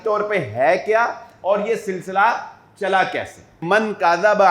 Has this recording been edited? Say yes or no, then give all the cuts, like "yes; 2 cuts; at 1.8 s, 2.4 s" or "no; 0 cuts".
yes; 1 cut; at 3.6 s